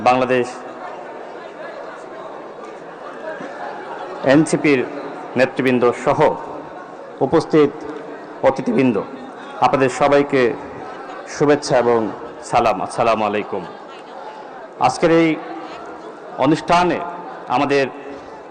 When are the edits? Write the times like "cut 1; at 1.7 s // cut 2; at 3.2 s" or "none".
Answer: none